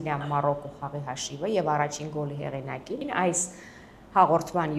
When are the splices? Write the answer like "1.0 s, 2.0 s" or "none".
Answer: 3.0 s